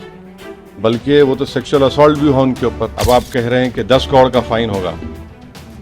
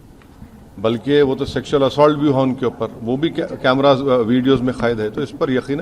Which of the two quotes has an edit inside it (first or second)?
first